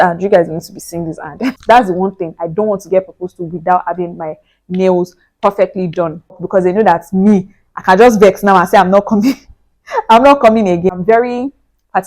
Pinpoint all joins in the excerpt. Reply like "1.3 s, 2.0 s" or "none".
1.5 s, 6.4 s, 10.9 s